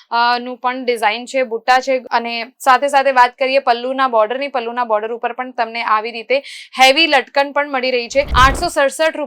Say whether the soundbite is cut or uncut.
cut